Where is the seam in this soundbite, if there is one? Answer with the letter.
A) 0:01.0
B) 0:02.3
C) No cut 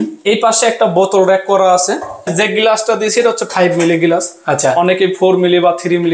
B